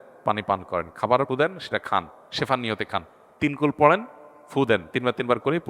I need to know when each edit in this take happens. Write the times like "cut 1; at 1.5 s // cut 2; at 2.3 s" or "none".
cut 1; at 1.3 s